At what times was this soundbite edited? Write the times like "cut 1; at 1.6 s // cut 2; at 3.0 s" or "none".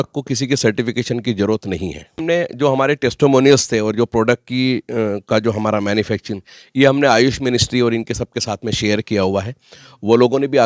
cut 1; at 2.1 s